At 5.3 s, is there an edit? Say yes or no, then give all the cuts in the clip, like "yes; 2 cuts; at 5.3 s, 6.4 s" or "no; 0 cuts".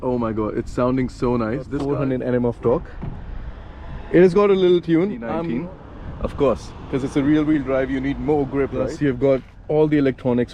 yes; 3 cuts; at 1.8 s, 5.3 s, 8.9 s